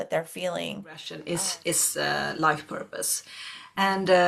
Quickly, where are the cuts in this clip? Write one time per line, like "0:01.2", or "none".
0:01.1